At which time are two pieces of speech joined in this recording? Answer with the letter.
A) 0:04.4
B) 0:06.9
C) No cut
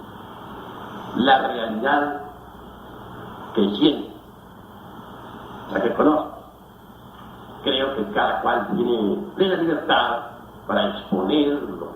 A